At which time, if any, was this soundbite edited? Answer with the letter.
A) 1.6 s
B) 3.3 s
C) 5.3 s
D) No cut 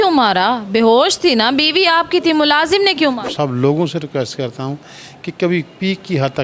B